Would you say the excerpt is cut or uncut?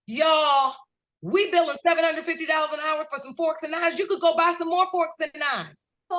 uncut